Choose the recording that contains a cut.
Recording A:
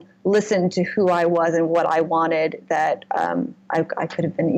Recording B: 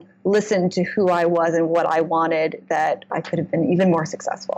B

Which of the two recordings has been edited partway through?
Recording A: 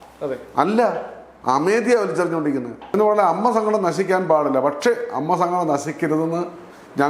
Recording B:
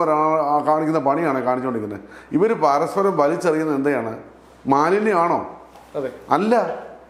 A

